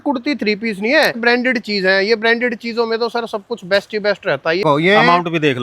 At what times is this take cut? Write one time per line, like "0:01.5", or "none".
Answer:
0:01.2
0:04.6